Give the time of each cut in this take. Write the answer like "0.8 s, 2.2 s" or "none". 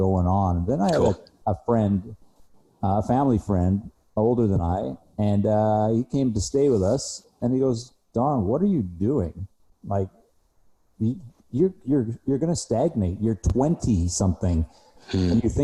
none